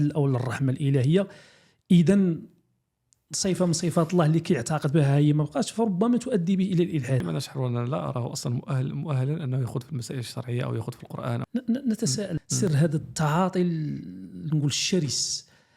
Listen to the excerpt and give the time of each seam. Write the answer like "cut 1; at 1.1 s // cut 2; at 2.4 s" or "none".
cut 1; at 7.2 s // cut 2; at 11.4 s // cut 3; at 12.4 s